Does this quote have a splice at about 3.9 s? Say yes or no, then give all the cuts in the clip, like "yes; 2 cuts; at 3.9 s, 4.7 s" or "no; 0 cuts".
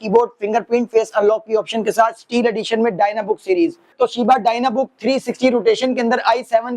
yes; 1 cut; at 3.9 s